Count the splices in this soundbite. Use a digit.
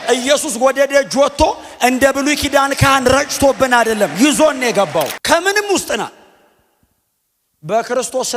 1